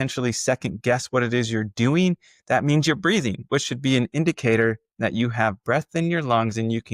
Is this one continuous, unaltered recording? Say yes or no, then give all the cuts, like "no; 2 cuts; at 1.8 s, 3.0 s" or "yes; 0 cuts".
yes; 0 cuts